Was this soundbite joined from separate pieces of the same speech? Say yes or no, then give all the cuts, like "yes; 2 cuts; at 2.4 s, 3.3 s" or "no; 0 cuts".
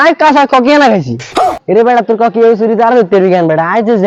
yes; 1 cut; at 1.6 s